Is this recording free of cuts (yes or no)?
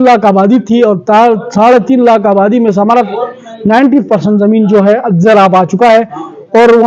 yes